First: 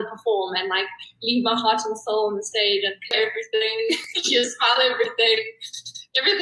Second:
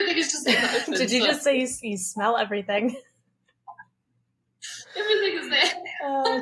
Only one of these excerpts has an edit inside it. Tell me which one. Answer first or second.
first